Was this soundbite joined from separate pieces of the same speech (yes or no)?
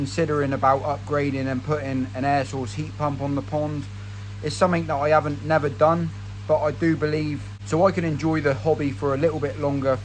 no